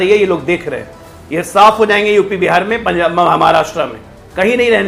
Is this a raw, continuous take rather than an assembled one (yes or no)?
yes